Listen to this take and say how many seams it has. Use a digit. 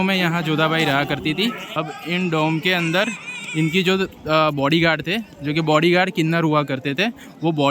1